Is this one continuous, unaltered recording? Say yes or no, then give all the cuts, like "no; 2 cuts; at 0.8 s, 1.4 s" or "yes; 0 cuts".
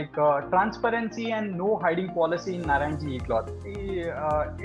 no; 1 cut; at 3.6 s